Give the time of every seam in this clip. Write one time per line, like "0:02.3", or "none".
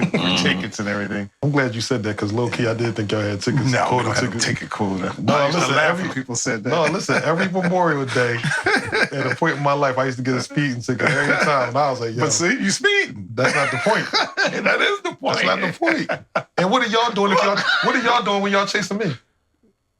0:01.3